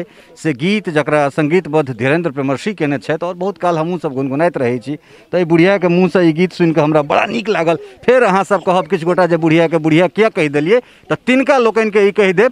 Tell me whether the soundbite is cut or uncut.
uncut